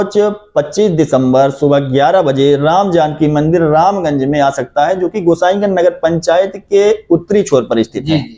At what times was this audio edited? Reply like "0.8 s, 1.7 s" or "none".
none

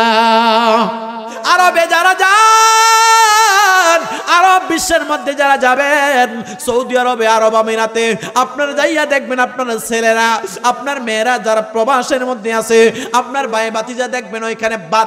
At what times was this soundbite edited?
1.4 s

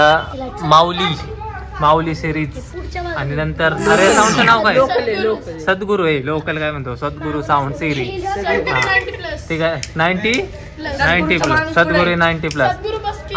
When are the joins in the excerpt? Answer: none

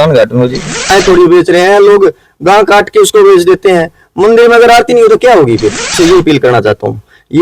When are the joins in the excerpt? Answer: 0.9 s, 5.9 s

